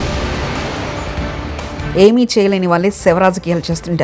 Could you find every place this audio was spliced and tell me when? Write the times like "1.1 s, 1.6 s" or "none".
1.8 s